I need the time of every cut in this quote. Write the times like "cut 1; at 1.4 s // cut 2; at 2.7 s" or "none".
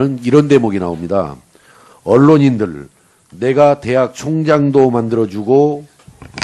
cut 1; at 1.4 s